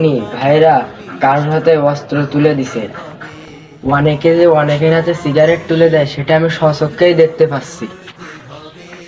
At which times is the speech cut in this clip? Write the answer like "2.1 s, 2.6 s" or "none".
none